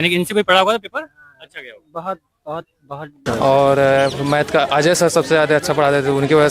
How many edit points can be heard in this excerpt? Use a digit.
1